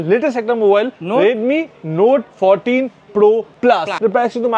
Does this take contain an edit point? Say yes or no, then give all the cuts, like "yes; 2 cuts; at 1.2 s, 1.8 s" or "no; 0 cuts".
yes; 2 cuts; at 2.3 s, 3.7 s